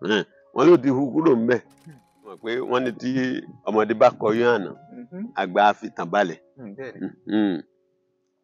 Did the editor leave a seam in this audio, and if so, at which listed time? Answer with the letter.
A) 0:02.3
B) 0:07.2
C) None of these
A